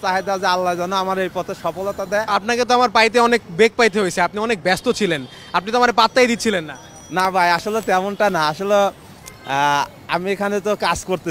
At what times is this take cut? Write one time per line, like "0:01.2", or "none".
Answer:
none